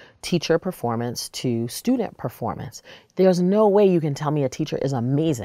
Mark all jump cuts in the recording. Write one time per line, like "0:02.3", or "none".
none